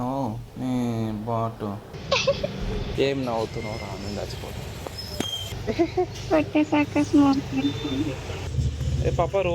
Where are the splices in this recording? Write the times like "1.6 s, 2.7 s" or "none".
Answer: 1.9 s, 2.9 s, 8.4 s

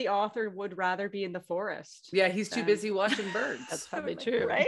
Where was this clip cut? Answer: none

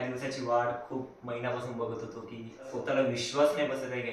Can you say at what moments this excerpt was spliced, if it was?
2.7 s

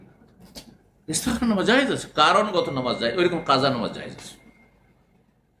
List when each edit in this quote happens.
none

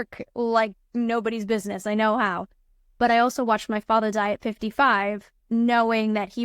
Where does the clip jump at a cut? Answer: 5.3 s

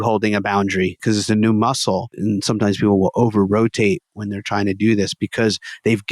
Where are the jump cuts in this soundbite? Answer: 1.0 s, 2.1 s

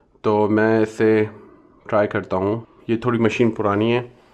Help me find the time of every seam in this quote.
2.7 s

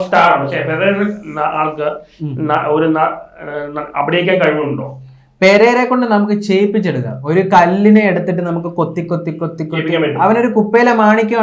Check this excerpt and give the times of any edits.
none

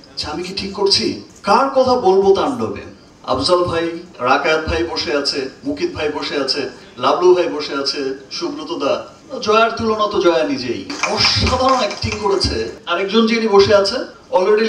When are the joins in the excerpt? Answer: 1.3 s, 4.1 s, 9.2 s, 12.8 s

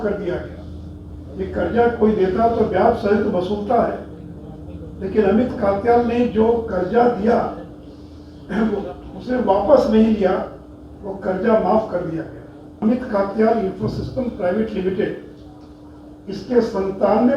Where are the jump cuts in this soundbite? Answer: 12.7 s

